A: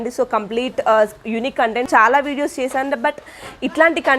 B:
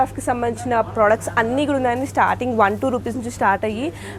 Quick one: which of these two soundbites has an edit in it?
A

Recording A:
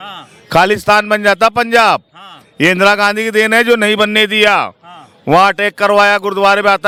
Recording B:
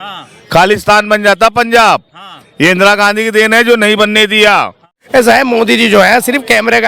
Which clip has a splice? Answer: B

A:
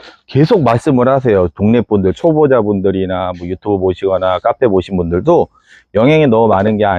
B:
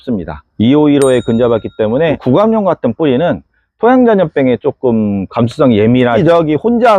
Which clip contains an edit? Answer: B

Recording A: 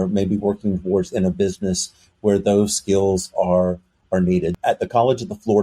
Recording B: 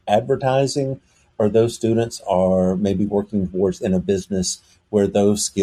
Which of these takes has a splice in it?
A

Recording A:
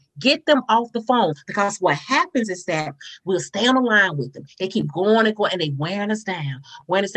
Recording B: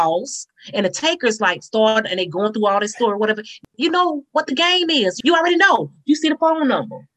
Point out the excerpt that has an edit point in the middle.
B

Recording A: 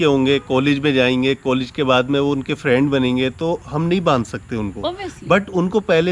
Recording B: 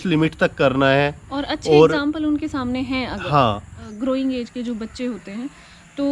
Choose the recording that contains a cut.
B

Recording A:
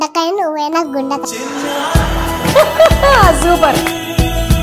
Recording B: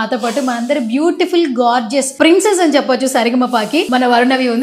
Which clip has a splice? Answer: B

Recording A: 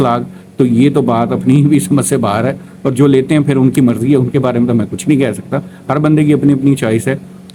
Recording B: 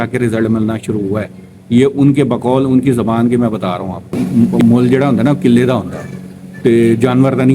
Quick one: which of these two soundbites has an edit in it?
B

